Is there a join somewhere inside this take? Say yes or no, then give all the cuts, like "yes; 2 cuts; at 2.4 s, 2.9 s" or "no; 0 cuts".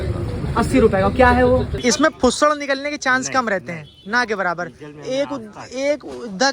yes; 1 cut; at 1.7 s